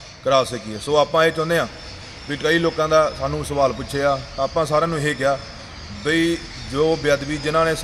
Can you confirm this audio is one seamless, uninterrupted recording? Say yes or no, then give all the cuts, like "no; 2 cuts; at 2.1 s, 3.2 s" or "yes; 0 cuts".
yes; 0 cuts